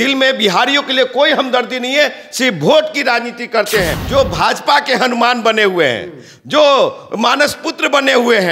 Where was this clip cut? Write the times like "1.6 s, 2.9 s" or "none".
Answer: 4.0 s